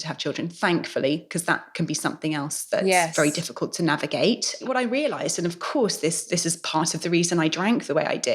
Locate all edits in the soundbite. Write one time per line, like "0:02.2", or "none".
0:04.4